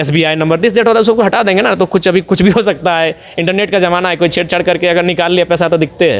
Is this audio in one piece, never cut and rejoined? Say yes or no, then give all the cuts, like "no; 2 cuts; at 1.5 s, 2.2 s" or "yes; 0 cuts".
yes; 0 cuts